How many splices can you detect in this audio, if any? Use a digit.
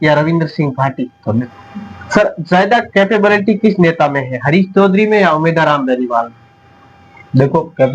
1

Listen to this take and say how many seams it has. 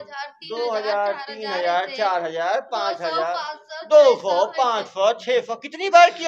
0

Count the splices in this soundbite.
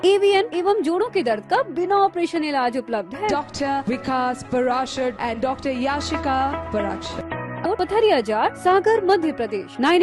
1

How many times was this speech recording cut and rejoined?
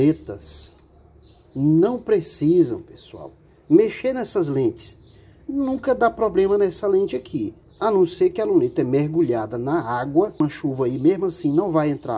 1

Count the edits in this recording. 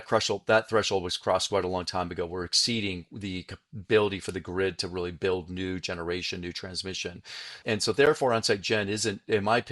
1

